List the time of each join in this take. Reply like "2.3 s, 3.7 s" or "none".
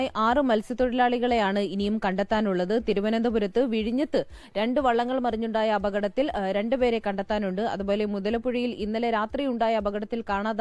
none